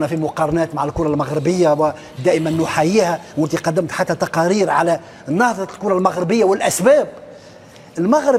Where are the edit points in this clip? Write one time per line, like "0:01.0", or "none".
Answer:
none